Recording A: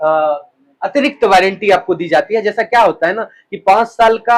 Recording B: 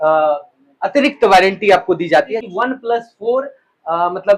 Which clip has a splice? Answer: B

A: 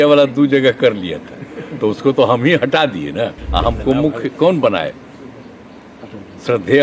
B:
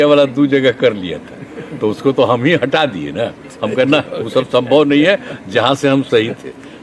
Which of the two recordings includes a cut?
A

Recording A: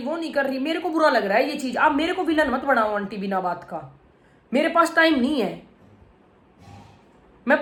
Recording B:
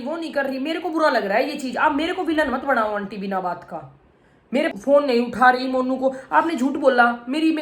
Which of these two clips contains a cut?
B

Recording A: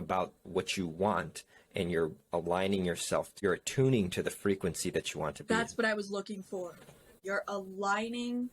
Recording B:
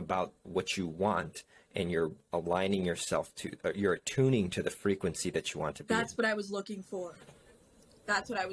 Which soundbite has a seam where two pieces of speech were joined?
A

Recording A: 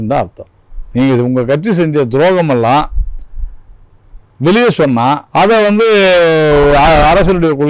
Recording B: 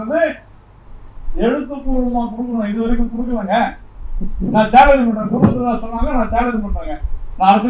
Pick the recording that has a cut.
A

